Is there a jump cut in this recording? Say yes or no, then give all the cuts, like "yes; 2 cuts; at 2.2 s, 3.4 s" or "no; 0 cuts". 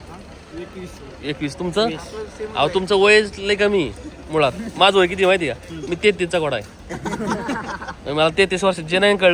no; 0 cuts